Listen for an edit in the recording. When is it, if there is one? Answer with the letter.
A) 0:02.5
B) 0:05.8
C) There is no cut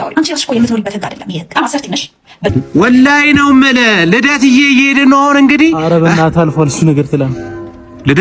A